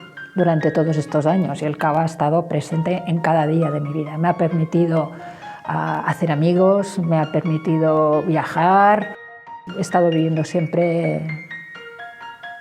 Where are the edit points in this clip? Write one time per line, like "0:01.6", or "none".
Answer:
0:09.4